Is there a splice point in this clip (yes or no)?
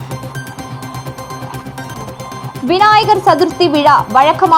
yes